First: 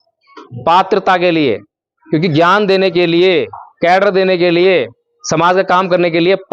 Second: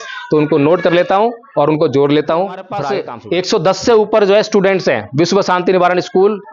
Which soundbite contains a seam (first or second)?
second